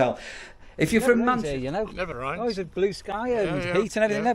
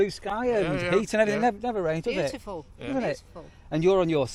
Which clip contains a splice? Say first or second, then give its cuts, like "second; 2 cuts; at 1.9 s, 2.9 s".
first; 1 cut; at 1.4 s